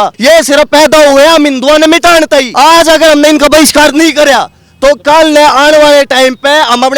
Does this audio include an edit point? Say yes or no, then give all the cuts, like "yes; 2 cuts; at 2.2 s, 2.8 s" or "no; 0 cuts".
yes; 1 cut; at 2.5 s